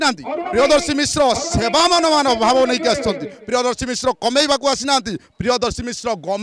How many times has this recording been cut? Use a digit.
0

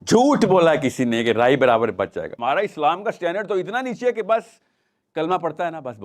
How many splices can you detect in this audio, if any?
1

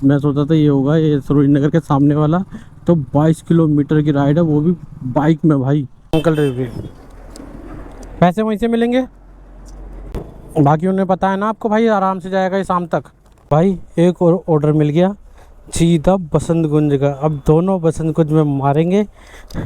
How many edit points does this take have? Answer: 3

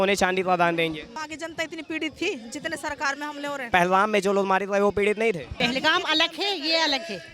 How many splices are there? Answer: 3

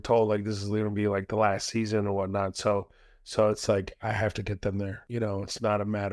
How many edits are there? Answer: 1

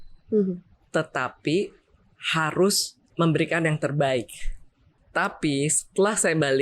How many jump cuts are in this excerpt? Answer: 2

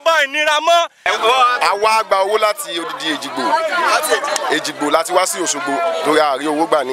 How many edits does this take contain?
1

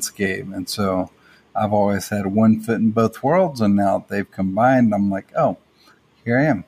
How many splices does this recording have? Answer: 0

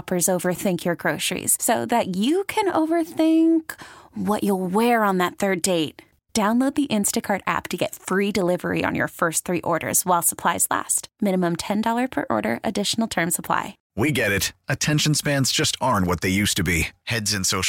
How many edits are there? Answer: 1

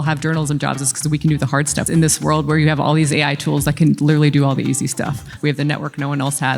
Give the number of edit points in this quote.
2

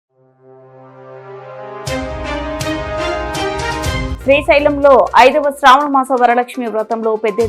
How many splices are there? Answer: 0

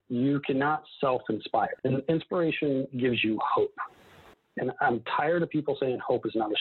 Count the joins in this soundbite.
1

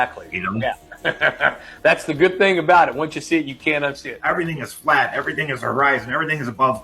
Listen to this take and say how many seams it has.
1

